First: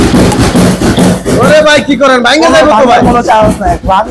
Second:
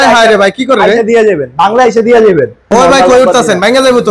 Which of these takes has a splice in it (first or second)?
second